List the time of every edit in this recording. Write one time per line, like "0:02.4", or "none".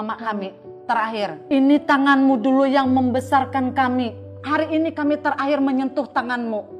0:01.4
0:04.4